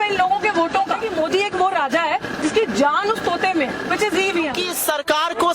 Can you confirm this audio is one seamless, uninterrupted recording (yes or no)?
no